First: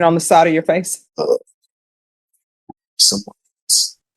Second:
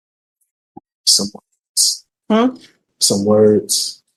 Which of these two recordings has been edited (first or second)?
first